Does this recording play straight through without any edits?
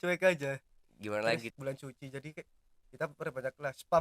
no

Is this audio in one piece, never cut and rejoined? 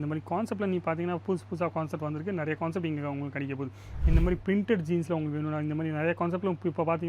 no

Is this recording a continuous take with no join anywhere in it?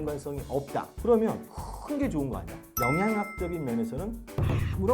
no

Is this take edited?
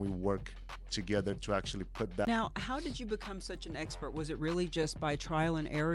yes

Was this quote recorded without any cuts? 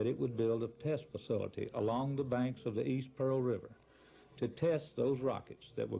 no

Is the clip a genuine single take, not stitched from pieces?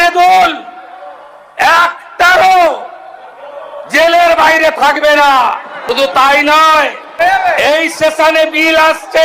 no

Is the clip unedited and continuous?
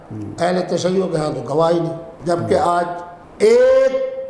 no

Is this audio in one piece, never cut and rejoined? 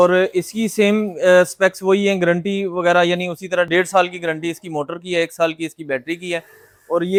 yes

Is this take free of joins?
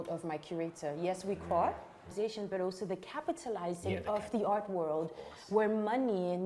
no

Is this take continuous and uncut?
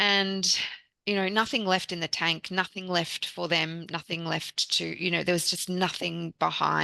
yes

